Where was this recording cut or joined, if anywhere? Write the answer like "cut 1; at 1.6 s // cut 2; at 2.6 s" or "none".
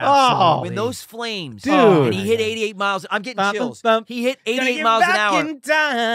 none